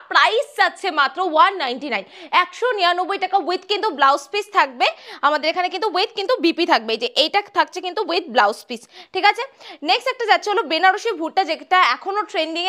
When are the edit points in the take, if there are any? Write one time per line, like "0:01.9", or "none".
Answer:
none